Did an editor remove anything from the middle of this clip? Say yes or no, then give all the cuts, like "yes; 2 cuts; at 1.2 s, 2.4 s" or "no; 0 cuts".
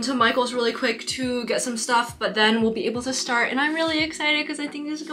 no; 0 cuts